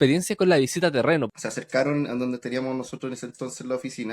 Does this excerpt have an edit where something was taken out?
yes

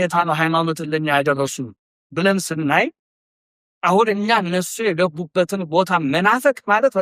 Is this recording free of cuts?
yes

